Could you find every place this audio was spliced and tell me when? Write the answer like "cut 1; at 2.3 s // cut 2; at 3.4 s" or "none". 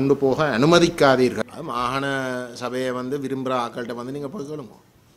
cut 1; at 1.4 s